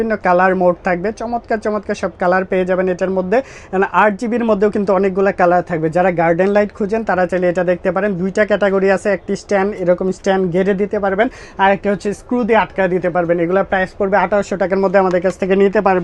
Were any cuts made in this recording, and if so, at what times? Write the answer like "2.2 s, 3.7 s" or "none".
none